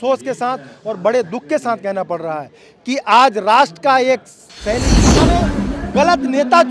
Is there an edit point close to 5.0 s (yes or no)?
yes